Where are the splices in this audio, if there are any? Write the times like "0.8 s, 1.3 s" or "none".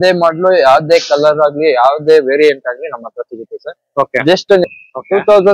4.6 s